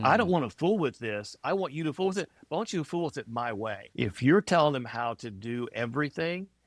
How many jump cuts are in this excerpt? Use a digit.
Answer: 1